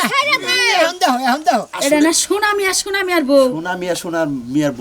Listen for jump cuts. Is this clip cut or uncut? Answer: cut